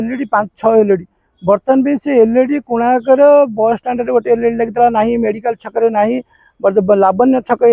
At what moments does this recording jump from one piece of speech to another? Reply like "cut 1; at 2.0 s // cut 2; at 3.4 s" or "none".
none